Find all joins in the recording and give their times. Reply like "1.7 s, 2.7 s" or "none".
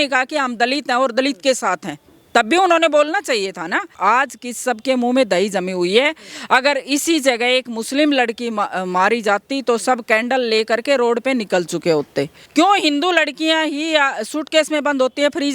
3.9 s, 12.4 s